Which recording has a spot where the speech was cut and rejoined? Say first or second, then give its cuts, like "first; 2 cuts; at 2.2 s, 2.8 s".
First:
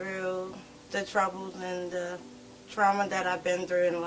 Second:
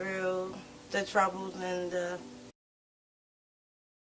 first; 1 cut; at 2.6 s